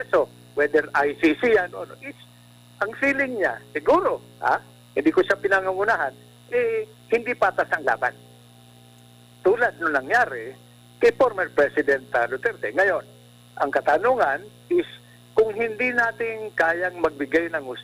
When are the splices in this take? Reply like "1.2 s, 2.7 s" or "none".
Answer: none